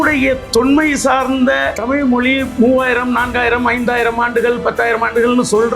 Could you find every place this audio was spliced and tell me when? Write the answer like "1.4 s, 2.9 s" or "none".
1.7 s